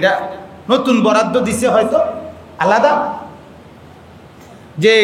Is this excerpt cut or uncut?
uncut